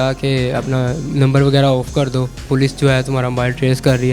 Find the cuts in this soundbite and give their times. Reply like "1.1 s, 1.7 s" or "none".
2.3 s

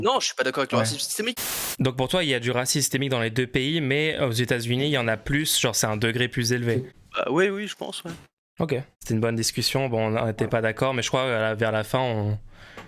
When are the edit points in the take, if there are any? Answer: 1.6 s, 7.0 s, 8.9 s

